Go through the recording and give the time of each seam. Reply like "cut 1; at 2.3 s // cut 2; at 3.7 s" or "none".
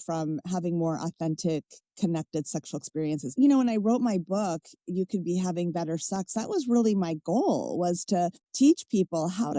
cut 1; at 3.3 s // cut 2; at 8.4 s